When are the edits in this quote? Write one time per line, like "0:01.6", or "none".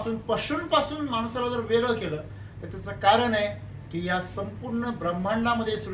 none